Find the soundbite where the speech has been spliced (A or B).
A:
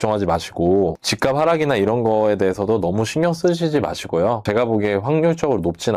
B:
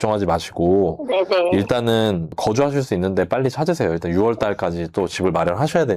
A